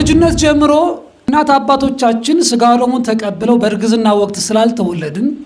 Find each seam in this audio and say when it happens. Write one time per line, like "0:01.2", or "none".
0:01.2